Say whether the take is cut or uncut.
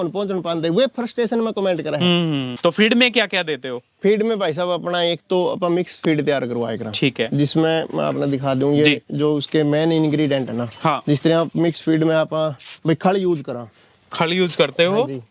cut